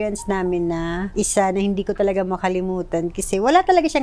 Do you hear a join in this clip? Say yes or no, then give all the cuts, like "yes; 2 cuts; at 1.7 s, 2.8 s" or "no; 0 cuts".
no; 0 cuts